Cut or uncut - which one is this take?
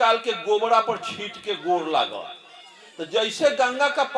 uncut